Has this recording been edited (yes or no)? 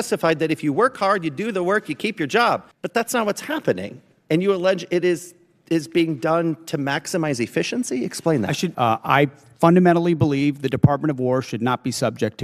yes